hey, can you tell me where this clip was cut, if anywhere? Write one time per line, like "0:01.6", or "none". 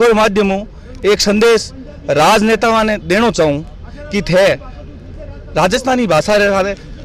none